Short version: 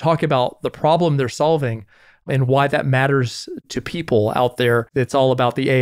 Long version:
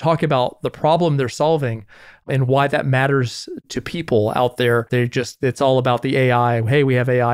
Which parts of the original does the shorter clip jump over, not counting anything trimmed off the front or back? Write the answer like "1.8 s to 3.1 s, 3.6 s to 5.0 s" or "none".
4.9 s to 5.3 s